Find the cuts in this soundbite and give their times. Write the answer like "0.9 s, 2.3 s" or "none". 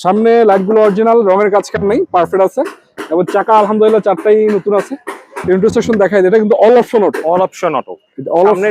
none